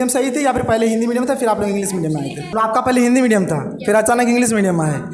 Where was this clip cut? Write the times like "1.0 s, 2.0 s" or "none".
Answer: 2.5 s

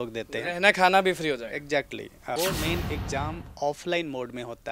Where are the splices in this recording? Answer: 2.4 s

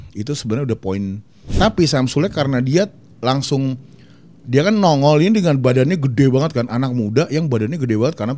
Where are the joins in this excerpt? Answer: 1.5 s

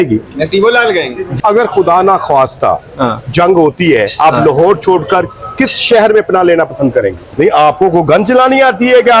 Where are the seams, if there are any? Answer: 1.2 s, 7.2 s

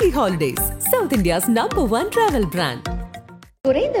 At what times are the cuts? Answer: none

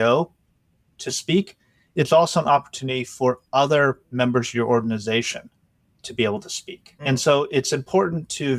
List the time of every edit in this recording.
7.0 s

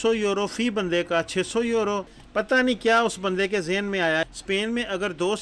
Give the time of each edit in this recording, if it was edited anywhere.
4.2 s

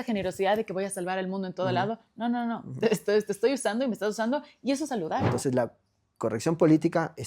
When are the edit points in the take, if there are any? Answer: 5.3 s

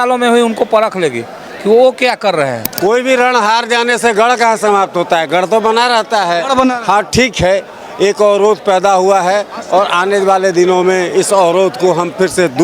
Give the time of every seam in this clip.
2.6 s

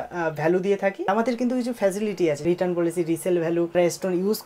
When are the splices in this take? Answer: 1.1 s, 2.4 s, 3.7 s

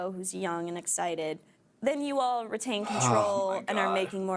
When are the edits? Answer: none

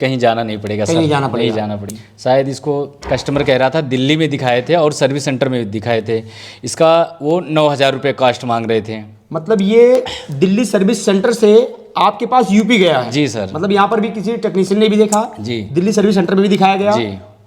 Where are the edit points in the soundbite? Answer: 1.9 s

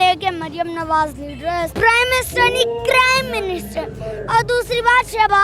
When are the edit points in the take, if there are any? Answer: 1.7 s

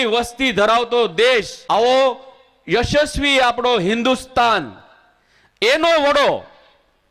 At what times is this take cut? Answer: 1.6 s

